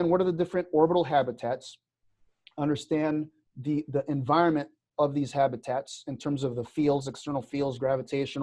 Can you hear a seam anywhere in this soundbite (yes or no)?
yes